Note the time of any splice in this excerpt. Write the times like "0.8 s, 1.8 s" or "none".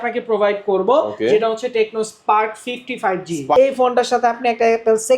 3.5 s